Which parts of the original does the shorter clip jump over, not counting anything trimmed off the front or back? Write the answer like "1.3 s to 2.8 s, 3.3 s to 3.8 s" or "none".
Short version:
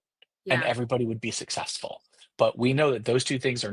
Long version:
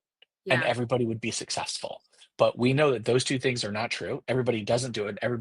none